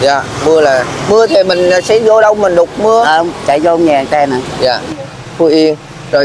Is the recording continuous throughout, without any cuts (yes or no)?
no